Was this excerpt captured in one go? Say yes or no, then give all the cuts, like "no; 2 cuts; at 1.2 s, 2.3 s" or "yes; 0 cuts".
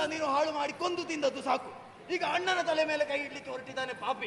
yes; 0 cuts